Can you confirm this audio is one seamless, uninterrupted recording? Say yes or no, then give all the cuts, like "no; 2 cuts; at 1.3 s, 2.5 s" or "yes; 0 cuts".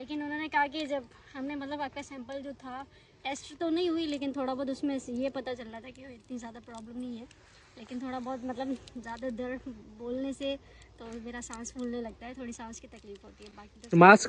yes; 0 cuts